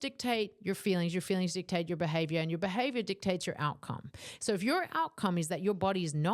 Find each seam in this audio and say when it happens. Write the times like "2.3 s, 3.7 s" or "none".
none